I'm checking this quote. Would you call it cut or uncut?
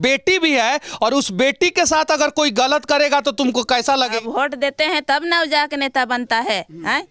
cut